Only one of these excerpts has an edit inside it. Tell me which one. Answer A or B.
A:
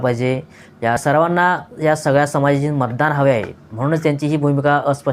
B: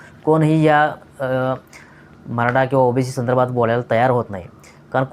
A